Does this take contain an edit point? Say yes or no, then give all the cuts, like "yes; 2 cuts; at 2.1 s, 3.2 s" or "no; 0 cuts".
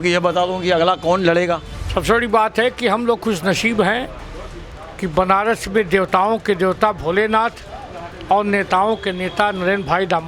yes; 1 cut; at 1.7 s